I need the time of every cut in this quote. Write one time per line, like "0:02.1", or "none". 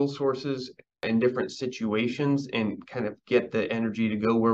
0:01.0